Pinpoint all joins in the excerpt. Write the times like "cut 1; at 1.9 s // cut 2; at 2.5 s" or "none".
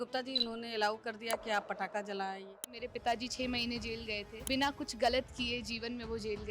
cut 1; at 2.7 s // cut 2; at 4.4 s